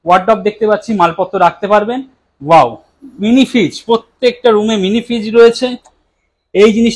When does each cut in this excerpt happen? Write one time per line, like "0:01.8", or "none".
none